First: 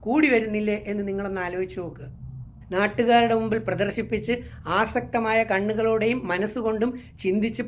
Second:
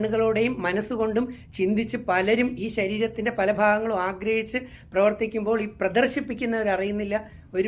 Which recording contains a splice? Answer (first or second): first